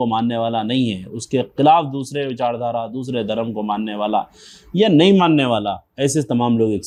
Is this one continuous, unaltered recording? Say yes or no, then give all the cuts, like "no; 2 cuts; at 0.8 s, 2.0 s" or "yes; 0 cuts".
yes; 0 cuts